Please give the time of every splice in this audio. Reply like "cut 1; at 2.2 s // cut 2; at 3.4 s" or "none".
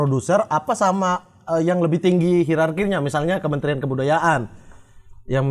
none